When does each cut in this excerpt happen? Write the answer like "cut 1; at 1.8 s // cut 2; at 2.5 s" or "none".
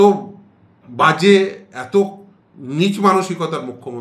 none